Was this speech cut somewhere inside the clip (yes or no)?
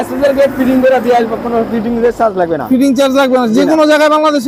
no